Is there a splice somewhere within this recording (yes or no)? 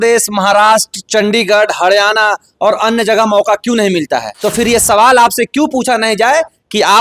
yes